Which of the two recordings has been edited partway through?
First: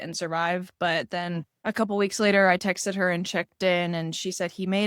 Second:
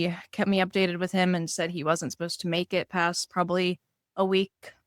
first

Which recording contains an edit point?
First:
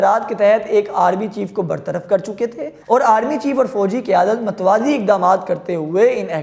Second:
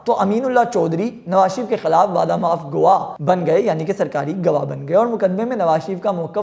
second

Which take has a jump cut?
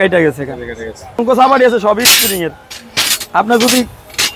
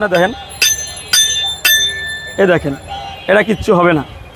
first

